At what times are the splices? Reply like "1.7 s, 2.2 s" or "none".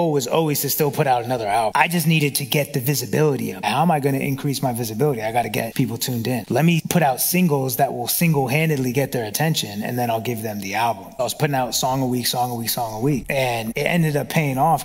11.1 s